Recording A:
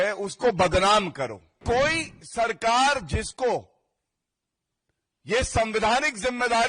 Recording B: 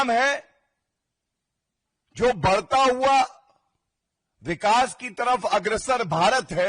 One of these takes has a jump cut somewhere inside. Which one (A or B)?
A